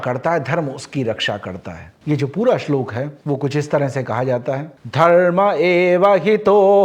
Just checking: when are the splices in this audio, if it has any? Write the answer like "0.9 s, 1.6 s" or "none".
none